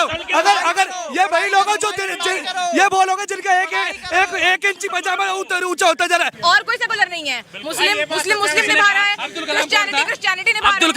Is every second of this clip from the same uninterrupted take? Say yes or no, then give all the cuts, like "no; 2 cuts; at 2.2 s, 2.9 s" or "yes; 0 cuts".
no; 1 cut; at 6.3 s